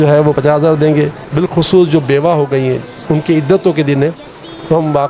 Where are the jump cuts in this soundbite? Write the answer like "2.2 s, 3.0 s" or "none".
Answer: 1.2 s